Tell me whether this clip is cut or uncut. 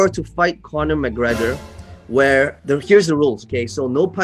uncut